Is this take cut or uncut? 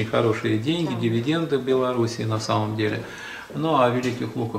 uncut